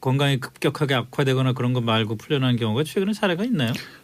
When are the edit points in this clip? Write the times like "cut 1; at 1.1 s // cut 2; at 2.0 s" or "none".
cut 1; at 1.6 s